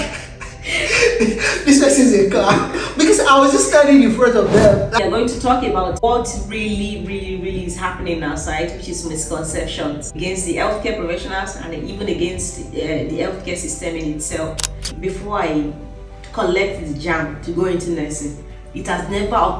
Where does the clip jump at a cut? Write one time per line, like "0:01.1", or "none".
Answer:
0:04.9
0:06.0
0:10.2
0:14.9